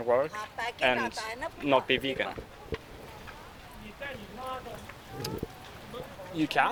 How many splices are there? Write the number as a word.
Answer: zero